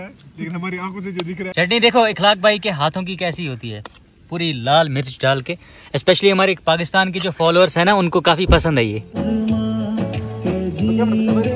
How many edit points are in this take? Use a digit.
2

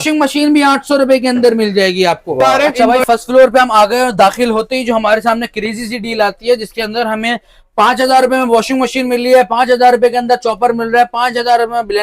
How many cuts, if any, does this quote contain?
0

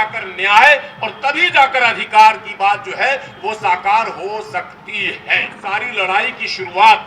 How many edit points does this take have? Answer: 1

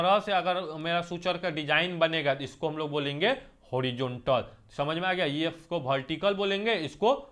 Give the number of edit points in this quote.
0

